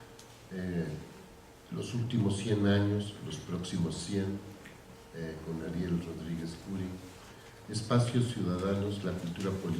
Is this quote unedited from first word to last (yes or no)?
no